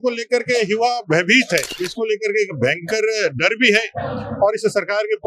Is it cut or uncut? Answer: cut